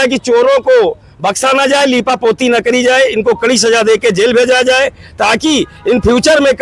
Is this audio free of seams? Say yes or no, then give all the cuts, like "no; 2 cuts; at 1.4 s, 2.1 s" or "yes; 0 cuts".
yes; 0 cuts